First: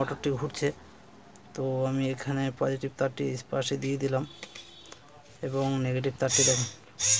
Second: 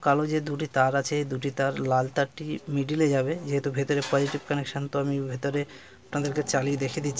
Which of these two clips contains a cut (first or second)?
second